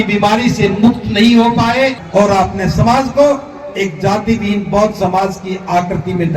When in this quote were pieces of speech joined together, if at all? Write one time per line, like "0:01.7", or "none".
0:02.0